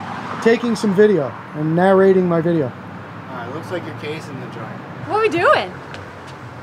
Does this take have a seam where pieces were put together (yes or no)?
yes